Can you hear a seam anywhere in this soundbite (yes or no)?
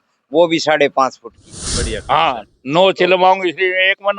yes